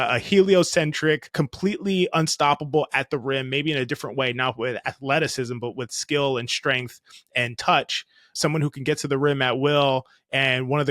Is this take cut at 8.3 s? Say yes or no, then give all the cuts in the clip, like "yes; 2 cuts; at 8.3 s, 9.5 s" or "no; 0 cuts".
yes; 2 cuts; at 1.3 s, 8.3 s